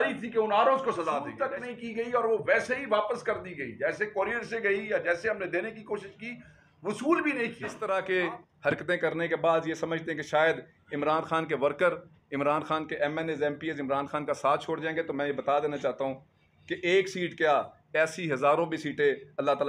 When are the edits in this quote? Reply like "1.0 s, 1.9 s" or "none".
1.3 s, 7.7 s